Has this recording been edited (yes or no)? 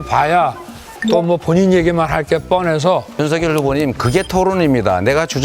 yes